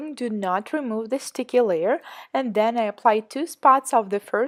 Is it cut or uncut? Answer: uncut